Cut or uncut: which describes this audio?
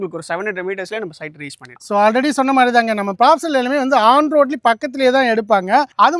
uncut